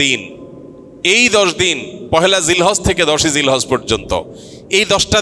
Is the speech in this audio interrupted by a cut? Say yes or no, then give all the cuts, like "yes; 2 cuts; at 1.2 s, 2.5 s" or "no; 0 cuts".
no; 0 cuts